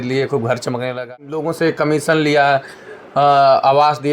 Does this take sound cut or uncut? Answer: cut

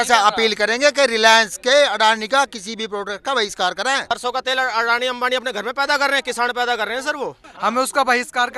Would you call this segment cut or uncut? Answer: cut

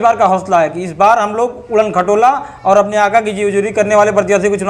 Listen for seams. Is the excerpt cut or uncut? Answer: uncut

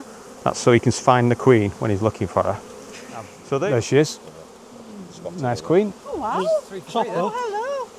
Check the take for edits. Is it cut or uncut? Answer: cut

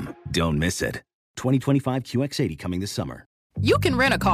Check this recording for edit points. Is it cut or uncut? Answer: cut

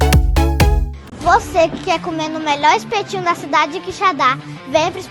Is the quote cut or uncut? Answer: cut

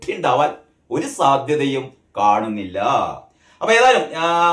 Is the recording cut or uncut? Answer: uncut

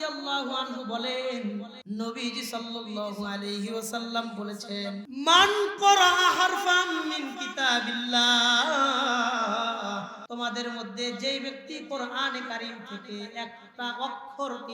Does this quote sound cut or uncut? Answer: cut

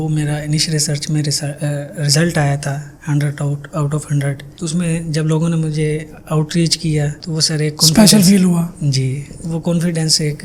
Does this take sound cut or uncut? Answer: uncut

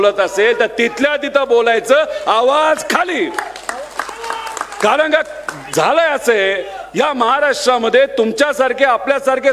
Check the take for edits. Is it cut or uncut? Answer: uncut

